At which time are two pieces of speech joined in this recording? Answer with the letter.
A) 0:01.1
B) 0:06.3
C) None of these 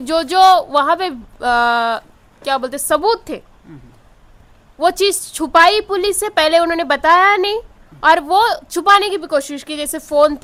C